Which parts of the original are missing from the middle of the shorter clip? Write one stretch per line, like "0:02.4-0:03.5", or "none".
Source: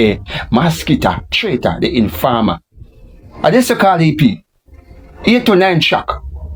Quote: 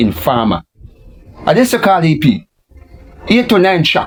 none